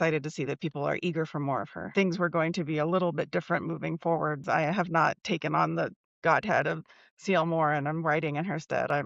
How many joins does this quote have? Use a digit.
2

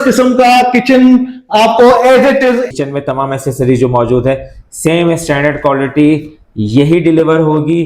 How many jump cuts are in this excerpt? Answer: 1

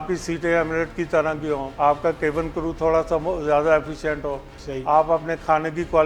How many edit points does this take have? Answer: 1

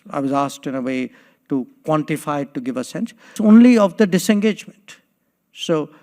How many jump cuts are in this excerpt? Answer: 1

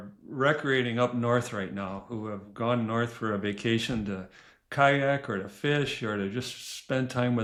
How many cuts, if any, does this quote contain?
0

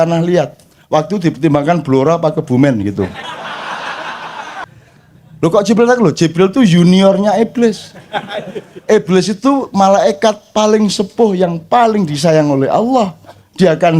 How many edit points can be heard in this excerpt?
1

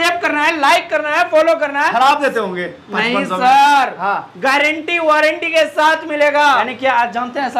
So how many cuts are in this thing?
1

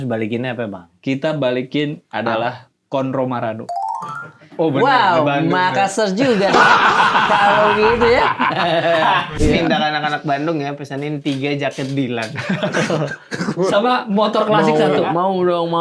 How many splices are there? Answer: 1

